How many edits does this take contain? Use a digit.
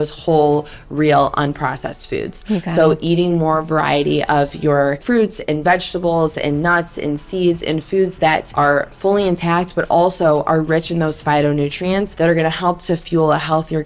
3